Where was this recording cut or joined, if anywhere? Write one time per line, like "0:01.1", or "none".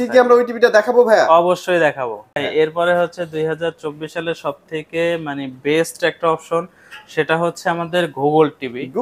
0:02.4